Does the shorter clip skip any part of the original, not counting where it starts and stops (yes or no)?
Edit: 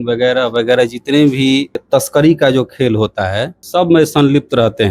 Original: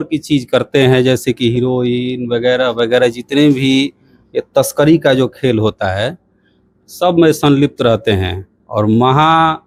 yes